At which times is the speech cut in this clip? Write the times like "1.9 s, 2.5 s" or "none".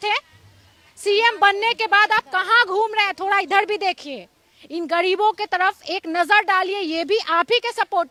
none